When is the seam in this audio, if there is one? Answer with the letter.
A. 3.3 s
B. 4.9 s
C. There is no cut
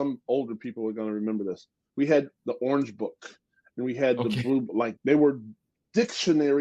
B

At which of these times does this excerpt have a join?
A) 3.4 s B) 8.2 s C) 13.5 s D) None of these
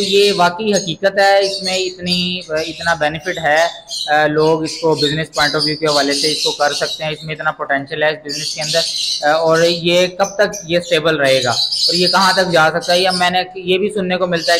D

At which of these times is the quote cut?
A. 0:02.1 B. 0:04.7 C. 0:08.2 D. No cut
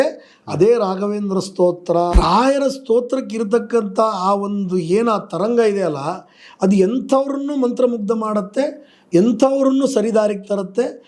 A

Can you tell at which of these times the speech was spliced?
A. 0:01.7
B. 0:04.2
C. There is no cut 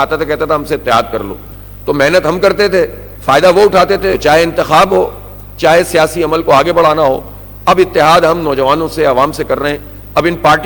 B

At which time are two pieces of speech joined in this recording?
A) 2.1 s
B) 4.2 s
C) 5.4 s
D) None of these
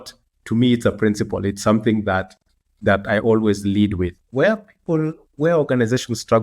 B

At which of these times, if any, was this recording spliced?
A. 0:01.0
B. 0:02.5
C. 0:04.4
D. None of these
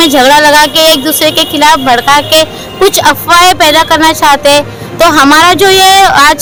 D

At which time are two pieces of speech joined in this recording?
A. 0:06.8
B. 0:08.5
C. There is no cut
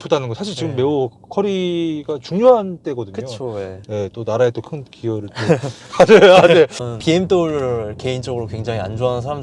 A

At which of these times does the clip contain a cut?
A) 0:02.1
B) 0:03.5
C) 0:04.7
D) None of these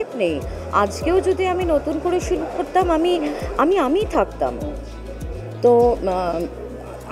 D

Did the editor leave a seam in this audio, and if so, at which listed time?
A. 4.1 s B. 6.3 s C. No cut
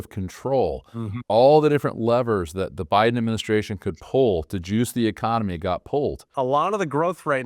B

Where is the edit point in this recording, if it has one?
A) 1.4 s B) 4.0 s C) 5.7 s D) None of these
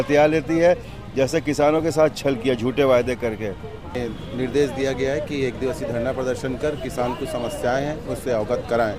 B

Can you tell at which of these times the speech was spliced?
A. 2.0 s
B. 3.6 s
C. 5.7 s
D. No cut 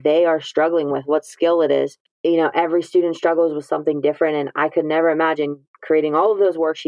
A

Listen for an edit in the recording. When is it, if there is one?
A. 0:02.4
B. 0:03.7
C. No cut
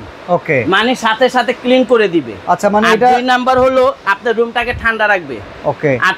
C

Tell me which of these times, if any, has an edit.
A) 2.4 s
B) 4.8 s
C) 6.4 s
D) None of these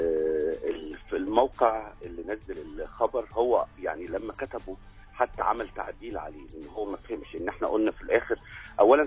A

